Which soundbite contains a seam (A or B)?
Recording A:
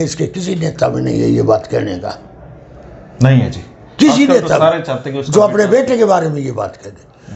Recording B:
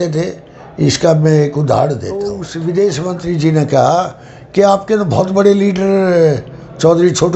B